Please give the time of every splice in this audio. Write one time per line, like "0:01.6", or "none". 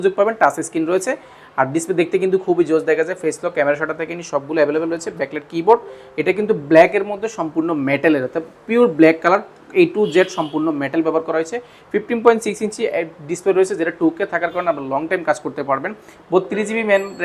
none